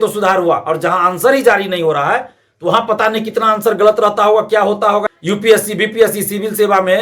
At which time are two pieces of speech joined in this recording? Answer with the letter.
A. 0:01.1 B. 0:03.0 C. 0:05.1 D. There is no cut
C